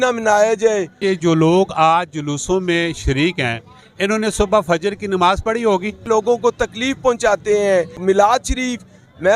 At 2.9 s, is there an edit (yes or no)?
no